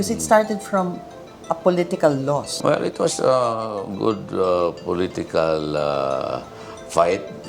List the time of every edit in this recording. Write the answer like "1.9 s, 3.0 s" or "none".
2.5 s